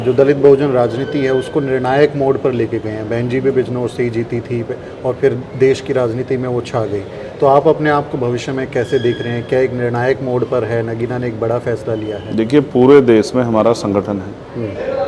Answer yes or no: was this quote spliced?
no